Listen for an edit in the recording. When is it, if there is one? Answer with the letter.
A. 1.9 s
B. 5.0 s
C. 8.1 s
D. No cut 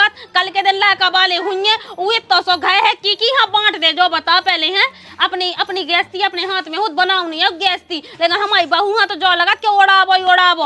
D